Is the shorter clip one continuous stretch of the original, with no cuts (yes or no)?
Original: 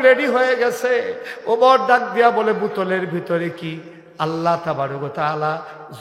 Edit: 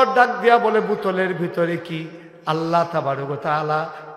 yes